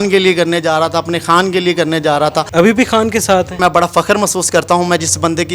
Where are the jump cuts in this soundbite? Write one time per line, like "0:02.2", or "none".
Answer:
0:02.4
0:03.6